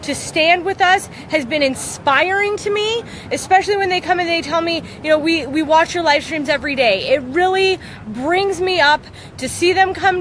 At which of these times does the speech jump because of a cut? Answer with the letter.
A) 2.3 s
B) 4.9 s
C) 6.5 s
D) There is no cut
B